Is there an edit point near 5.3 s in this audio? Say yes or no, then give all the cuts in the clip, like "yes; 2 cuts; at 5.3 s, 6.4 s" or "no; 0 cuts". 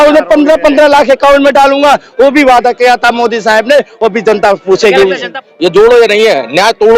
yes; 1 cut; at 5.3 s